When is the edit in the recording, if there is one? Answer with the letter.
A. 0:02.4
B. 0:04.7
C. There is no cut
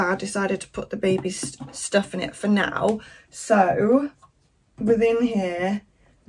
C